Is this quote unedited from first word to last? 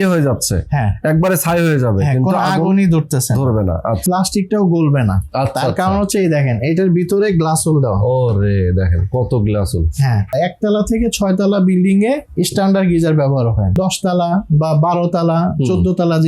no; 3 cuts; at 4.0 s, 10.3 s, 13.8 s

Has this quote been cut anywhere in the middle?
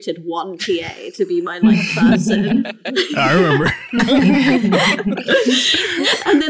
no; 0 cuts

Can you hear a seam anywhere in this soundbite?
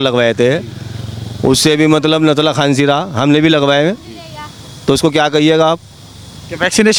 no; 0 cuts

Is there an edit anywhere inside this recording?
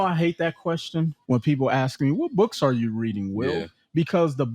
yes; 1 cut; at 1.2 s

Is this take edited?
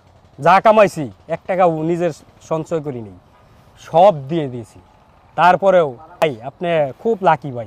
yes; 1 cut; at 6.4 s

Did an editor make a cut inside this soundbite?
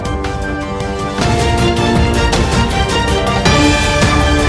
no; 0 cuts

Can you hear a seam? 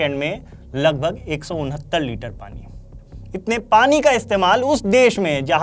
no; 0 cuts

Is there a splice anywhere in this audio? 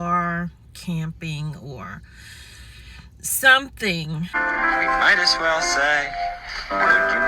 yes; 1 cut; at 4.3 s

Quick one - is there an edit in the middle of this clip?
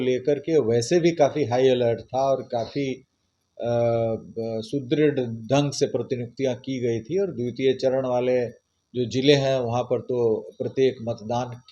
no; 0 cuts

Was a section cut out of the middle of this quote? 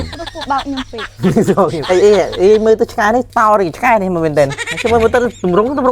yes; 3 cuts; at 1.8 s, 3.3 s, 4.6 s

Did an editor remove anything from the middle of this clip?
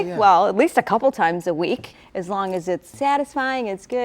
yes; 2 cuts; at 2.0 s, 2.9 s

